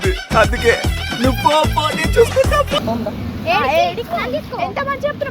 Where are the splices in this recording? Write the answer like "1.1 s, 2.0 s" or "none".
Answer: 2.8 s